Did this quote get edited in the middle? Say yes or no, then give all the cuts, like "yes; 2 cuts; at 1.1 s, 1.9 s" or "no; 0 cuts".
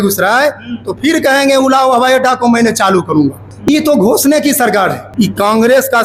yes; 2 cuts; at 3.5 s, 5.0 s